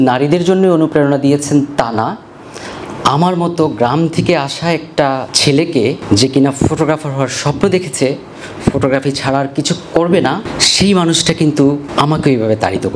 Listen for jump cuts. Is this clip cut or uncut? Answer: cut